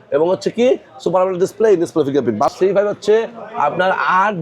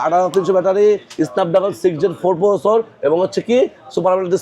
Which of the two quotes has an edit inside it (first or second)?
first